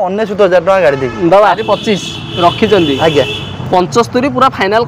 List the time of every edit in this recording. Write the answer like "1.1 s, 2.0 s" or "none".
1.6 s